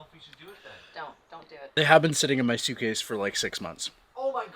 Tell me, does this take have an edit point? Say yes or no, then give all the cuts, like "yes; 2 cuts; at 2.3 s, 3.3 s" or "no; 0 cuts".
yes; 1 cut; at 1.6 s